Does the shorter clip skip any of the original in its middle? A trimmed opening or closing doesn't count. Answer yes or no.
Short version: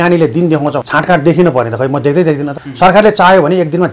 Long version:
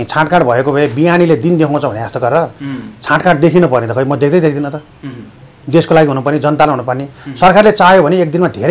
yes